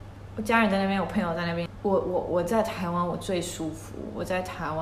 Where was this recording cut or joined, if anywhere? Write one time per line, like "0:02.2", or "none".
0:01.7

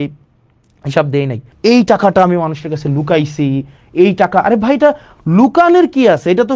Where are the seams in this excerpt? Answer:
0:01.5

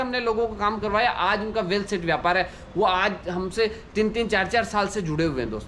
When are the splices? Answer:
none

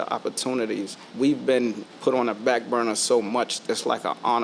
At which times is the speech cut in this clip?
0:01.0
0:01.9
0:03.6

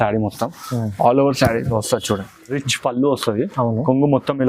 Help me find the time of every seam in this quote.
0:02.7

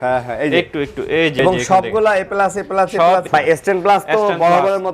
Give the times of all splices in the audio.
0:01.3
0:03.3

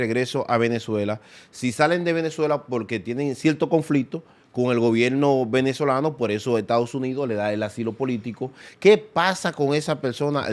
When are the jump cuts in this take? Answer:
none

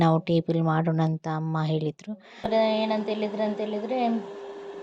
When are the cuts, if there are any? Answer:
0:02.5

